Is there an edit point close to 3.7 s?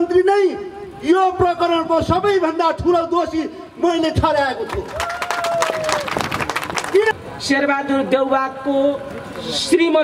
no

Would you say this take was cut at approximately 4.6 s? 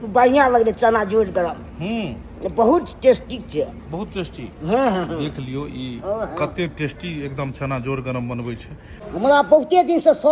no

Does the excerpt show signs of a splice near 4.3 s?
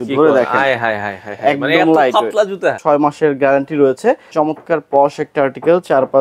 yes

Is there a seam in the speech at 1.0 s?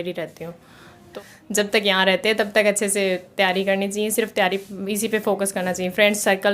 yes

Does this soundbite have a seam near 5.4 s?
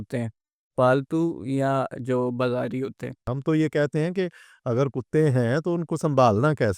no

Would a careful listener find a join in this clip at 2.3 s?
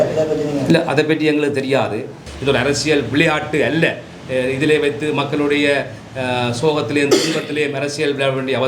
yes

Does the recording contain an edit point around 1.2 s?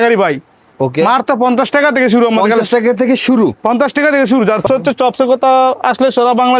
no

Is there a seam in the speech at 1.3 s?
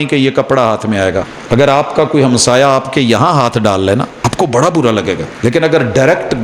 yes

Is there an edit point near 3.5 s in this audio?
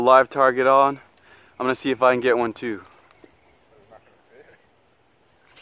no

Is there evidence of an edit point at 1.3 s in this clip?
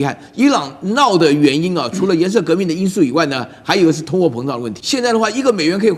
no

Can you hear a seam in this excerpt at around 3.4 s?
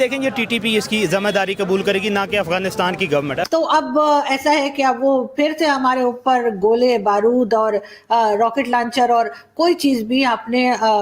yes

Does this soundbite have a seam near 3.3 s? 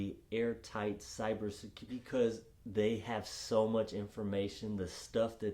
no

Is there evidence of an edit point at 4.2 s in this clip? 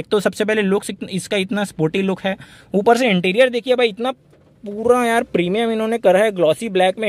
no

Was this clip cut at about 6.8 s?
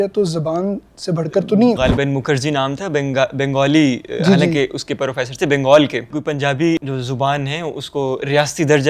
yes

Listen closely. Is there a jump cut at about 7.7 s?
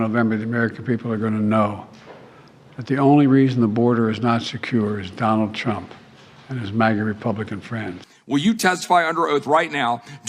yes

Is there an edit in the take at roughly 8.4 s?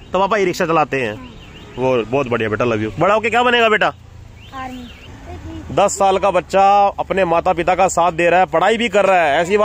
no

